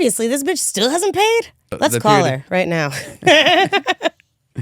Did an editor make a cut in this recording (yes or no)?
yes